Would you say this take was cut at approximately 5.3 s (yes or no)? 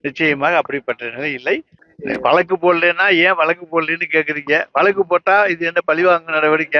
no